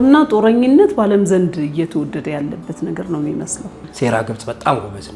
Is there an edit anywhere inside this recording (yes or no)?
yes